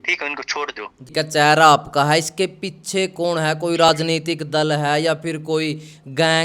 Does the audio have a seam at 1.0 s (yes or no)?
yes